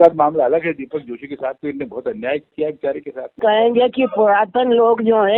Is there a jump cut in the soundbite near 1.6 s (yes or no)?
no